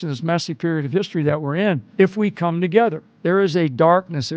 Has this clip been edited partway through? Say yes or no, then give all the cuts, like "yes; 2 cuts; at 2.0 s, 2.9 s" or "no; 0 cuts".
yes; 2 cuts; at 1.9 s, 3.2 s